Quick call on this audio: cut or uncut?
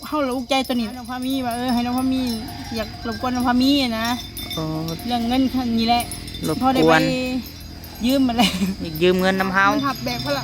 cut